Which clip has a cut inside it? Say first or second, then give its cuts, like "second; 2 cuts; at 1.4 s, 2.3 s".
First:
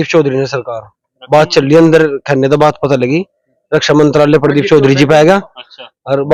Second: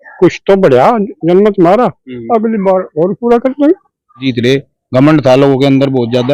second; 1 cut; at 4.2 s